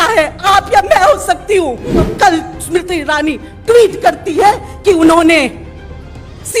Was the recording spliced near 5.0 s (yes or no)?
no